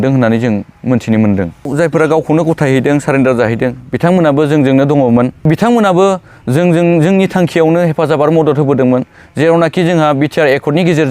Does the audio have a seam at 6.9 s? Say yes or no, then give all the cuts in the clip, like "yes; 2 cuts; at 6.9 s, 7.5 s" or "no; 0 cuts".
no; 2 cuts; at 1.7 s, 5.4 s